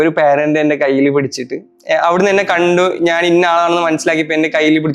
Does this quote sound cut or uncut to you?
uncut